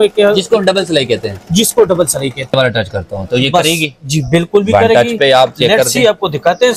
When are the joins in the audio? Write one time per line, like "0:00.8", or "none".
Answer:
0:02.5